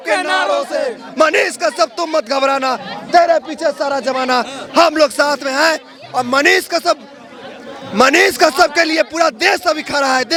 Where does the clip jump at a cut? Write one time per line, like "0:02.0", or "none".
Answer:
none